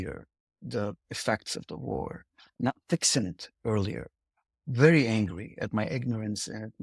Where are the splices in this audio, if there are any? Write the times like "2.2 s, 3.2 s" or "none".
2.5 s